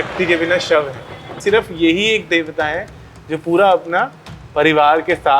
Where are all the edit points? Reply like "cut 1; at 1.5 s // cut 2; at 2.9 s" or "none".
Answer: cut 1; at 1.2 s